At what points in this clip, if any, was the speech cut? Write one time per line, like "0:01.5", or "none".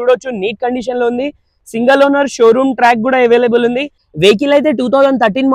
0:04.2